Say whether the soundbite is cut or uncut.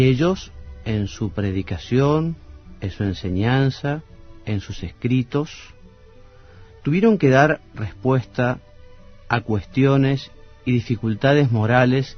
cut